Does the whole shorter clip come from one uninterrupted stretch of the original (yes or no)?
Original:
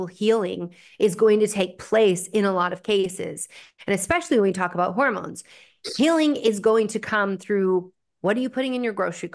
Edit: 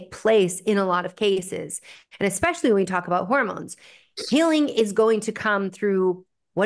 yes